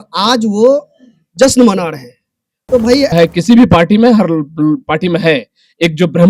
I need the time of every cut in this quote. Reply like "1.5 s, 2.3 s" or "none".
3.1 s